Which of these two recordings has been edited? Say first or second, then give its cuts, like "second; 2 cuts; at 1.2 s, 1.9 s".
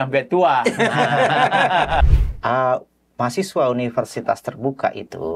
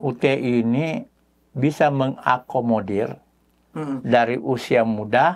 first; 1 cut; at 2.1 s